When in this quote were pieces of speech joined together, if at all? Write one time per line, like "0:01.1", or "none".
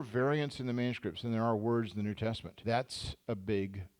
0:02.5